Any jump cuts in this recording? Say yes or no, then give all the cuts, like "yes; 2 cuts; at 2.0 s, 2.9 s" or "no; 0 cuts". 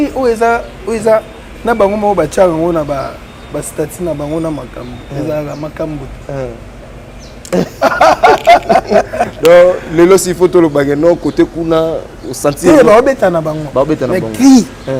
no; 0 cuts